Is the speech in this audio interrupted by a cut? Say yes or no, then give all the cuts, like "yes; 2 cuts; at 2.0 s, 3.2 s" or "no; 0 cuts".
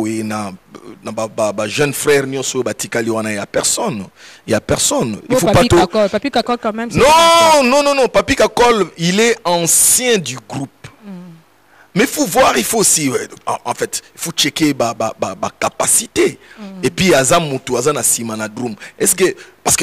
no; 0 cuts